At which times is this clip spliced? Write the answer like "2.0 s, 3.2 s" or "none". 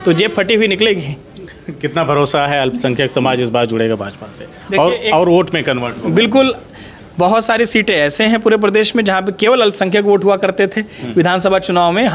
none